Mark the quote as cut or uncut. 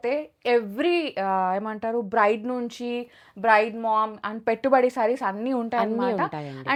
uncut